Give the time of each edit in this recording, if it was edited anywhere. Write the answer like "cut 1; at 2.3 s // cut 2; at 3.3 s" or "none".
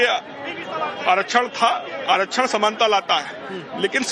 cut 1; at 0.9 s